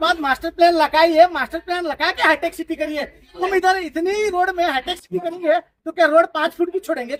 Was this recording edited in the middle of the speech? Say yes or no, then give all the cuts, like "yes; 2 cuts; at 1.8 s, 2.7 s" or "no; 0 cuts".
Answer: no; 0 cuts